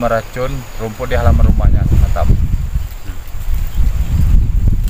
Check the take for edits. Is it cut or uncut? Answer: cut